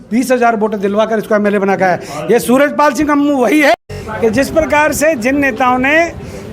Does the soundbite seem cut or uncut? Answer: cut